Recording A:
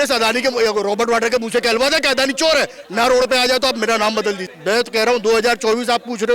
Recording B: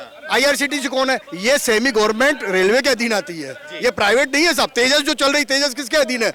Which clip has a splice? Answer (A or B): A